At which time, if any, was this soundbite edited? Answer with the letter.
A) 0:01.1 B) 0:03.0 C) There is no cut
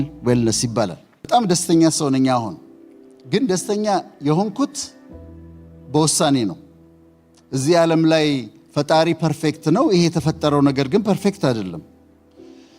A